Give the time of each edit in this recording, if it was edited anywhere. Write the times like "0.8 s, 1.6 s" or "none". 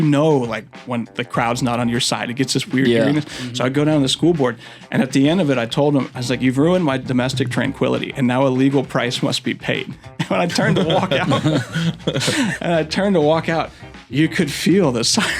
none